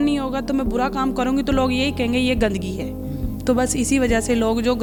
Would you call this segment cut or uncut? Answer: uncut